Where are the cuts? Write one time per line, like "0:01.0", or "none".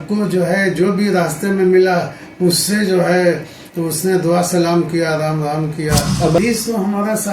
0:06.4